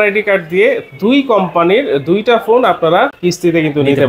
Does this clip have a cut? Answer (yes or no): yes